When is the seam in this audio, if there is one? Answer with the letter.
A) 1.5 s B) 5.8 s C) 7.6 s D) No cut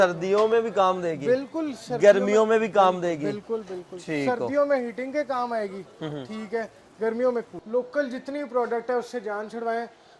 C